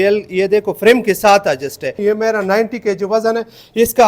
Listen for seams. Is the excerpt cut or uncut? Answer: cut